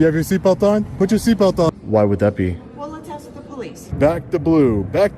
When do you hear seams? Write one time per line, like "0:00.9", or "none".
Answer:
0:01.8
0:03.9